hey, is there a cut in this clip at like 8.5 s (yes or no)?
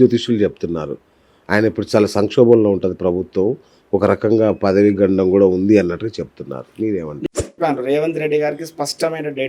no